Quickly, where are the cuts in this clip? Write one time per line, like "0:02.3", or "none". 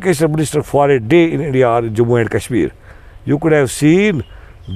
none